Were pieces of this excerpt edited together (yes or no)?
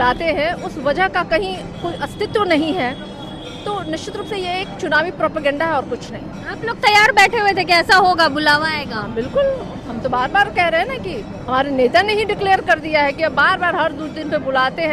no